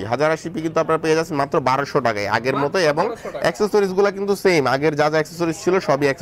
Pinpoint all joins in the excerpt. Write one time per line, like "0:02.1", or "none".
none